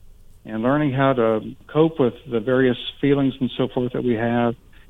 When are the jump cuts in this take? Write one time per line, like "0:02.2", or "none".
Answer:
0:01.6